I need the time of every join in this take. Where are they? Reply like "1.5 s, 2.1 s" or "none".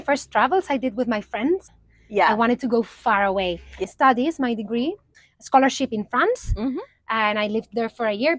1.8 s, 3.8 s, 5.1 s